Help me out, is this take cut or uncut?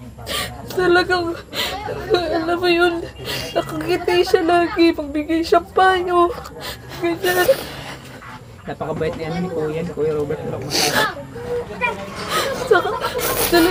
uncut